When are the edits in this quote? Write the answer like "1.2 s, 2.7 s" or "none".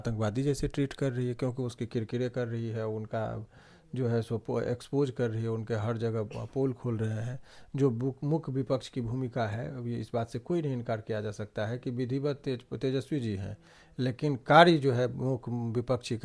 none